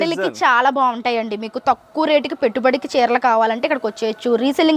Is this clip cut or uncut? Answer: uncut